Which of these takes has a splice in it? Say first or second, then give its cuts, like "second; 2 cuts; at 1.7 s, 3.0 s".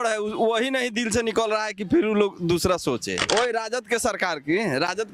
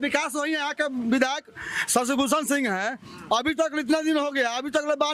first; 1 cut; at 3.2 s